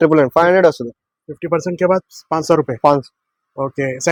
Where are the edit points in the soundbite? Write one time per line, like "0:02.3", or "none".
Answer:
none